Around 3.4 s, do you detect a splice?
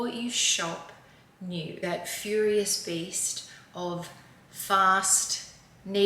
no; 1 cut; at 1.8 s

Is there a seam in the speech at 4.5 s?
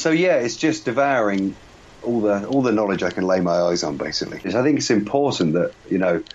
yes; 1 cut; at 4.5 s

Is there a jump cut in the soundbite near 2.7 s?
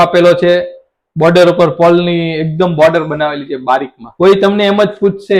no; 1 cut; at 4.0 s

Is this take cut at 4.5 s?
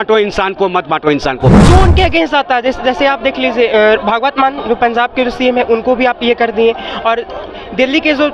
no; 1 cut; at 1.6 s

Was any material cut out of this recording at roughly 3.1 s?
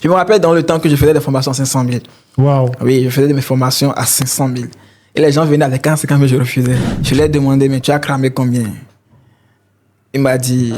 no; 1 cut; at 6.9 s

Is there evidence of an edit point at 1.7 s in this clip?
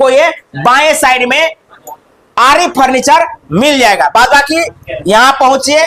no; 0 cuts

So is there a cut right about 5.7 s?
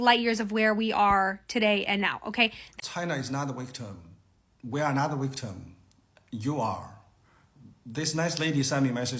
no; 1 cut; at 2.6 s

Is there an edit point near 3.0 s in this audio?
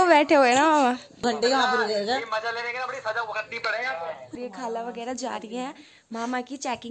no; 2 cuts; at 1.2 s, 4.3 s

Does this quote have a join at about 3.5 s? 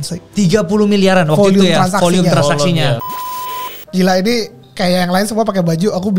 yes; 1 cut; at 3.5 s

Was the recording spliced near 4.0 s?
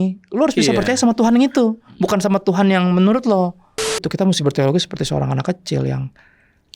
yes; 1 cut; at 4.0 s

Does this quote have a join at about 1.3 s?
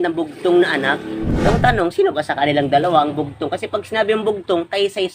yes; 1 cut; at 1.3 s

